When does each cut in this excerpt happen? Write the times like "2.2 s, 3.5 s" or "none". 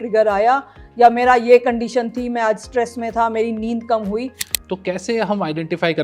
4.4 s